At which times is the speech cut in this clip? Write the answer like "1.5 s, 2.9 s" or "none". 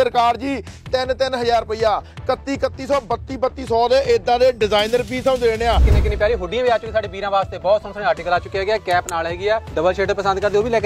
5.9 s, 9.7 s